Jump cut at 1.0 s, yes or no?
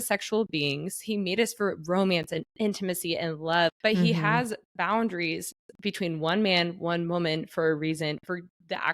yes